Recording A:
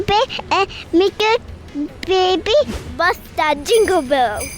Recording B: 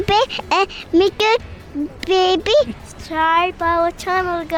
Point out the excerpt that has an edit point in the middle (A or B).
A